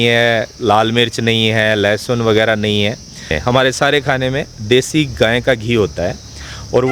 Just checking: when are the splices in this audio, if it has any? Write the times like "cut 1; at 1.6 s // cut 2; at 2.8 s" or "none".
cut 1; at 3.3 s